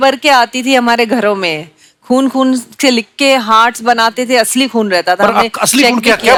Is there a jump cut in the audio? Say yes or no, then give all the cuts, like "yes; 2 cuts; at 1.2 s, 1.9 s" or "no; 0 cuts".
no; 0 cuts